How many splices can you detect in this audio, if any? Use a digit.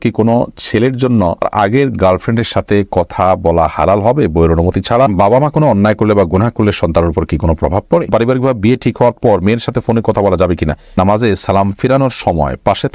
4